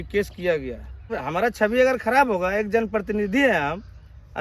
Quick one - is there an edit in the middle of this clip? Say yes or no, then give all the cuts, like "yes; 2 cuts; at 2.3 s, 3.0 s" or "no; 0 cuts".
yes; 1 cut; at 1.1 s